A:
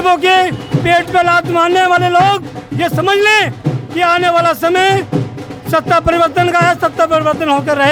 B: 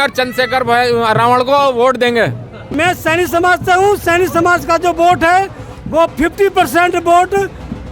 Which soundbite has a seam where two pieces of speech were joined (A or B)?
B